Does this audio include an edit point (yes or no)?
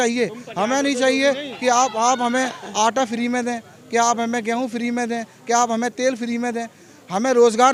no